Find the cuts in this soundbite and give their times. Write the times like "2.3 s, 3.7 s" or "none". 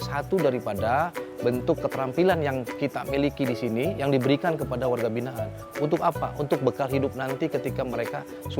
none